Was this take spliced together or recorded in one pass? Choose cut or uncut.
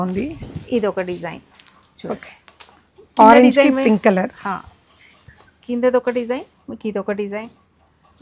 uncut